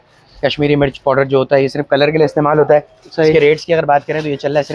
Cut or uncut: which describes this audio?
uncut